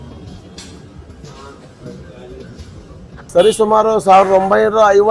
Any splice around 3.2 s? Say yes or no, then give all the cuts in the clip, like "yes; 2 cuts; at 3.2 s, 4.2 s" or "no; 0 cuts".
yes; 1 cut; at 3.2 s